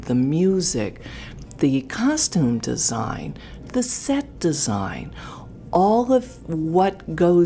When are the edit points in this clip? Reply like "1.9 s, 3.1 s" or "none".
none